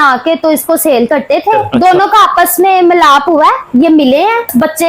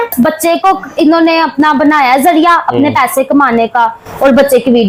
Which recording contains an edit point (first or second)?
first